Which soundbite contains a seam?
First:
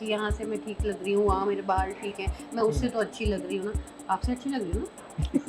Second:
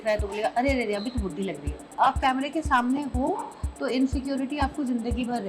second; 1 cut; at 2.0 s

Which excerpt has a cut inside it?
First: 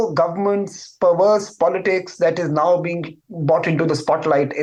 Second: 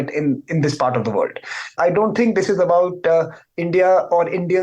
second; 1 cut; at 1.8 s

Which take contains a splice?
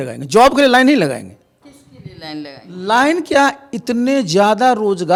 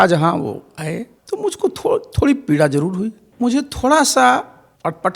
second; 1 cut; at 3.2 s

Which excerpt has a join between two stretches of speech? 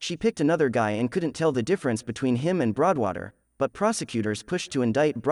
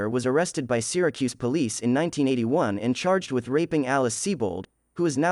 first; 1 cut; at 2.1 s

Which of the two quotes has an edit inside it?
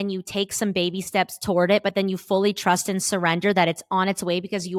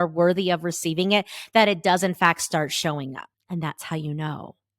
second; 1 cut; at 3.3 s

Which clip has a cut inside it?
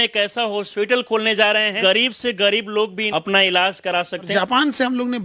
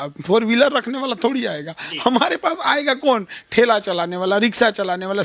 first; 3 cuts; at 1.8 s, 3.0 s, 4.3 s

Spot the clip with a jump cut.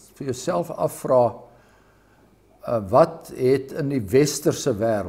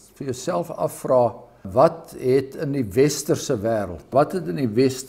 second; 2 cuts; at 1.7 s, 4.1 s

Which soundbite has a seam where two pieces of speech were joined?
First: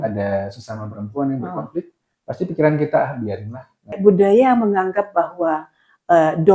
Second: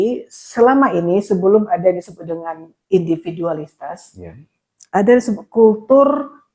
first; 1 cut; at 3.9 s

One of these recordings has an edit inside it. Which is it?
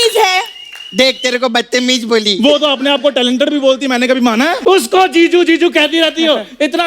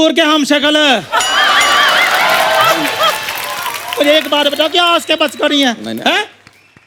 first; 1 cut; at 4.6 s

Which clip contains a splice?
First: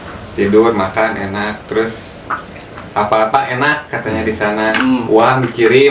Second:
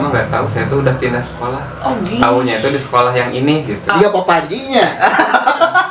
second; 1 cut; at 3.9 s

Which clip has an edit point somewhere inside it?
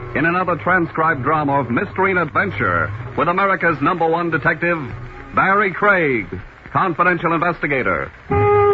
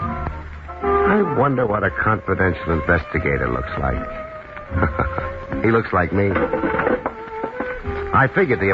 second; 1 cut; at 4.6 s

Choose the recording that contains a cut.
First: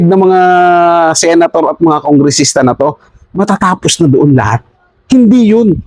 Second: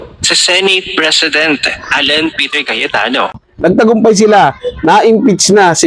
second; 1 cut; at 3.3 s

